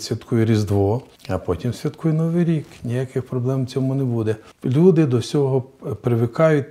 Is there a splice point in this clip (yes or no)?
yes